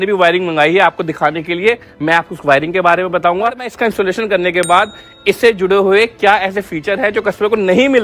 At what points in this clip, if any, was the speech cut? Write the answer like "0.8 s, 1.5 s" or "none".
3.7 s